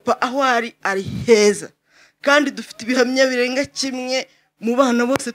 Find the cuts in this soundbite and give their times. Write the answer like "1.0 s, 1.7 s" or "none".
none